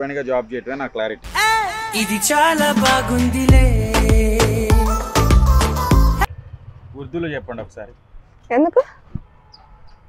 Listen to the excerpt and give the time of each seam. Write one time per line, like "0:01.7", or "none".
0:01.2
0:06.3